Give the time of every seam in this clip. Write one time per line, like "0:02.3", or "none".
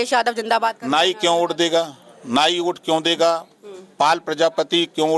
none